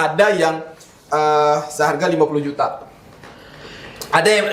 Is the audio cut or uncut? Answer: uncut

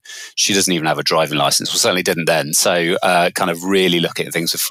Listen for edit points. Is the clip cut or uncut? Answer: uncut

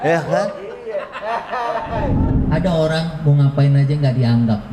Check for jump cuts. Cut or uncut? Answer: cut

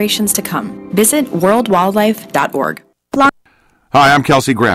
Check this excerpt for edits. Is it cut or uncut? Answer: cut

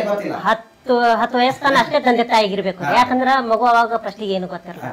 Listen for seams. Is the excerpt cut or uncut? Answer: uncut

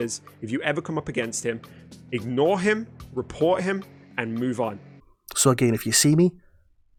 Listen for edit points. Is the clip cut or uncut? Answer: uncut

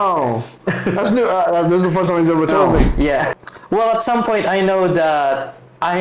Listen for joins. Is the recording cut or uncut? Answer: cut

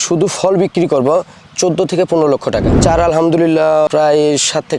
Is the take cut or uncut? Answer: cut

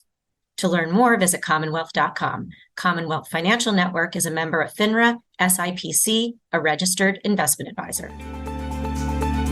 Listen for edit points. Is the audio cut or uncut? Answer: cut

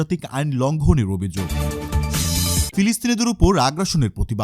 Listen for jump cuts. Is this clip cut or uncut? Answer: cut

